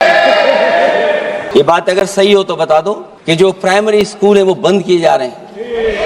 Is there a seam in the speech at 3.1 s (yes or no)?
yes